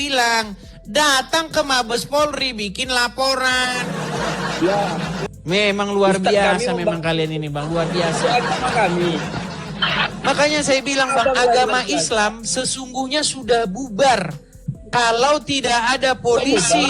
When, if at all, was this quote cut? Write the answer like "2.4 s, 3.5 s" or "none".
5.3 s